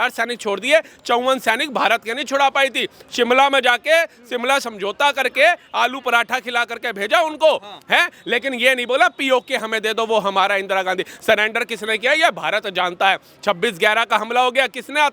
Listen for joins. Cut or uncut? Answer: uncut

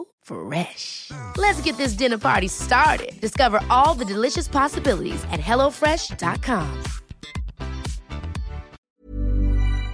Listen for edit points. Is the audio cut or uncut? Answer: cut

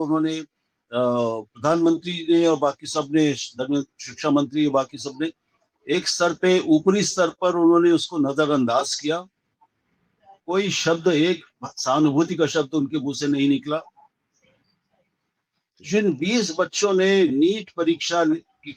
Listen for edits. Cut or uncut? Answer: uncut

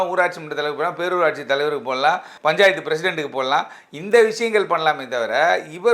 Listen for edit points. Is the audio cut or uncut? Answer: cut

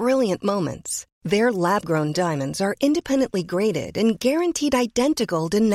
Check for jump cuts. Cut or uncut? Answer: uncut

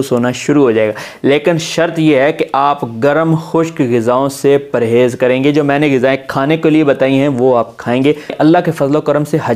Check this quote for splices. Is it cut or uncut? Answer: cut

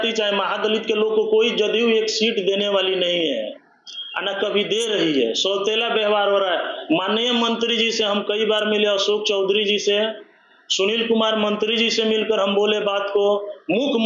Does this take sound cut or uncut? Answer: uncut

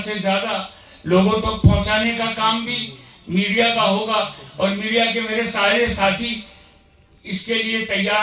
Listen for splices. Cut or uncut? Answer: uncut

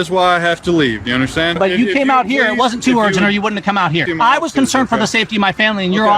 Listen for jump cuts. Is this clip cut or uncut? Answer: cut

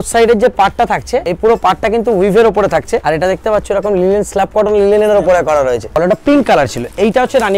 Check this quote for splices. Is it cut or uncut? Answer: cut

